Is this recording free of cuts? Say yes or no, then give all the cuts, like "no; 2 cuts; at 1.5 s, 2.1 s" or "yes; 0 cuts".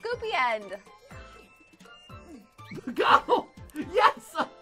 yes; 0 cuts